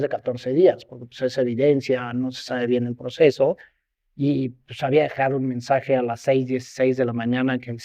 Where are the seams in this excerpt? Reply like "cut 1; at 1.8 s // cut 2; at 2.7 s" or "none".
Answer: none